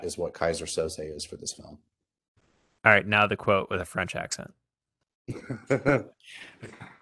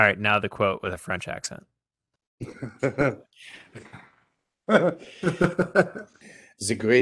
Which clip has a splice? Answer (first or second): second